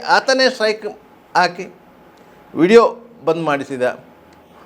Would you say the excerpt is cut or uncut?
uncut